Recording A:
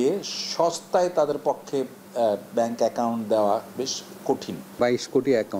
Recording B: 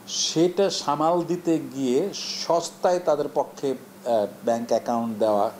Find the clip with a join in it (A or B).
A